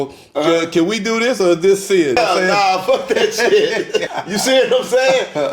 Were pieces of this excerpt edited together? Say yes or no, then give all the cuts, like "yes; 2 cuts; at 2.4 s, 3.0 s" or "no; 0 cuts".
yes; 2 cuts; at 2.2 s, 4.1 s